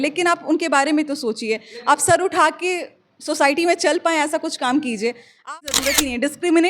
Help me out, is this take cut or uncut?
cut